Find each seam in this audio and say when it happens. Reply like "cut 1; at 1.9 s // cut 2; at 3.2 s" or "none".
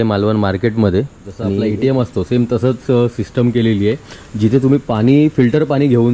cut 1; at 1.6 s